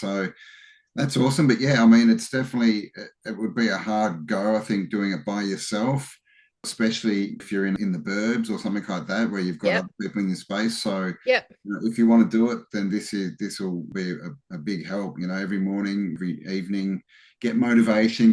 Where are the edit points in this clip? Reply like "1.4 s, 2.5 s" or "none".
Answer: 6.6 s, 7.7 s, 13.9 s, 16.2 s